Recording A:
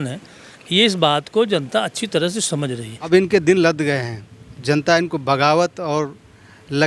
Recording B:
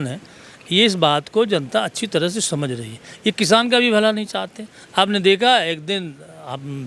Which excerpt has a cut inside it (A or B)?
A